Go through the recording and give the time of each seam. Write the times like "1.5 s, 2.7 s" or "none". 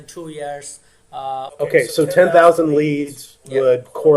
none